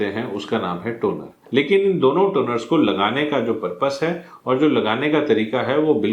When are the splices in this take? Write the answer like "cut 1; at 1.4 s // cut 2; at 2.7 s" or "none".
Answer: cut 1; at 1.3 s